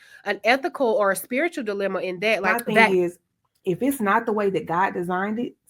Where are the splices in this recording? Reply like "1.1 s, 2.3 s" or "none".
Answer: 2.5 s